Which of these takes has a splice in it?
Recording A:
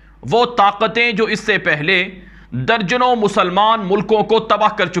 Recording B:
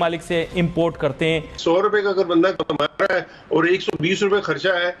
B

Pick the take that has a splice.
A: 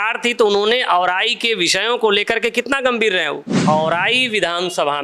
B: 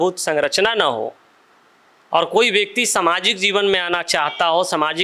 A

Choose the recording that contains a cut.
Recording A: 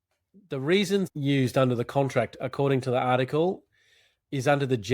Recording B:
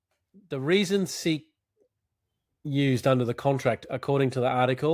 A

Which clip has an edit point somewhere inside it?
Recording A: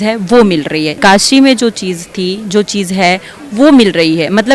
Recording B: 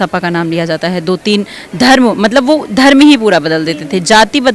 A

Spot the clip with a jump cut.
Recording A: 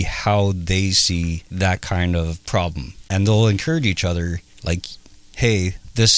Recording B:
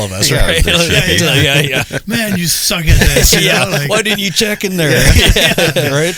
A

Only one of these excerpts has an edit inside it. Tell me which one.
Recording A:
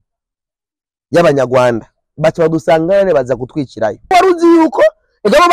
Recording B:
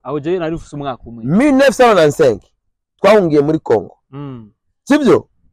A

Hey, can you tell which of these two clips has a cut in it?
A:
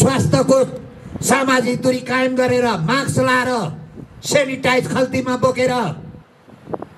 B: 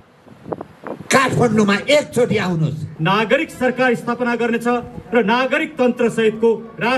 B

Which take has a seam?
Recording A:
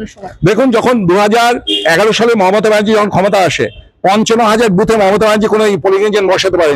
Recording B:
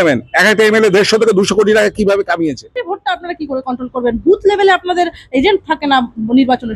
B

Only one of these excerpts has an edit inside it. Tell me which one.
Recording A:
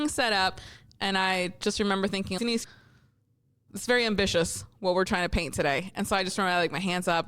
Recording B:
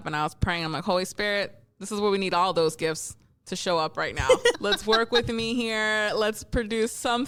A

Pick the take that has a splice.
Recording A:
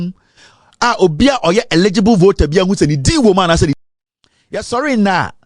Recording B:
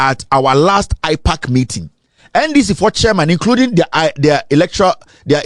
A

